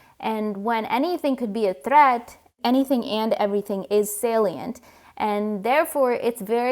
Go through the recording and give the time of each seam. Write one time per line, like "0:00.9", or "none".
0:02.6